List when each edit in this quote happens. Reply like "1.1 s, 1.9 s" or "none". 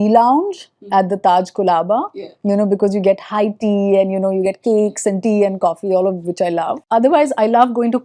none